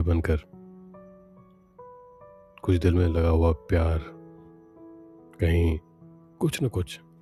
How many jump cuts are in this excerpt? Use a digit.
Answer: 0